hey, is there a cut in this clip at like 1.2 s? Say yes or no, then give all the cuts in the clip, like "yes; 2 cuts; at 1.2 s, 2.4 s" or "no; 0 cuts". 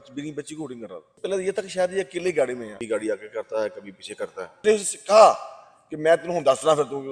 yes; 3 cuts; at 1.2 s, 2.8 s, 4.6 s